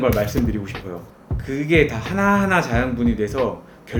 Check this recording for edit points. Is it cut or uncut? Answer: cut